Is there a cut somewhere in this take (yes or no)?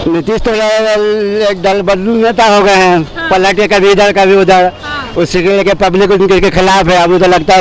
no